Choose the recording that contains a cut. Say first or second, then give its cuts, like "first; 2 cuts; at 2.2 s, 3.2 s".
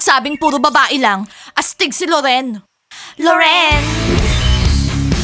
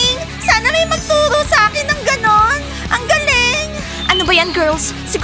first; 1 cut; at 3.9 s